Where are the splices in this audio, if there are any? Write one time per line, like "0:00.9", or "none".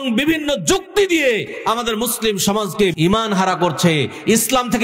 0:03.0